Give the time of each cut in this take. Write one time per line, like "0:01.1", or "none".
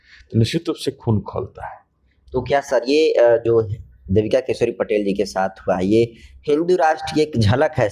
none